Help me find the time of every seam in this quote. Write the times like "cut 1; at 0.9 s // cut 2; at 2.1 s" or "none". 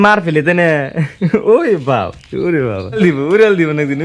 cut 1; at 3.0 s